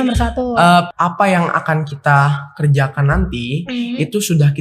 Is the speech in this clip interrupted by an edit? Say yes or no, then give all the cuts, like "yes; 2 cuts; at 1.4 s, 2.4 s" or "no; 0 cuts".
yes; 1 cut; at 0.9 s